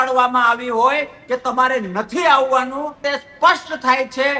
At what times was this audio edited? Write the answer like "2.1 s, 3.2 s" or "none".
3.0 s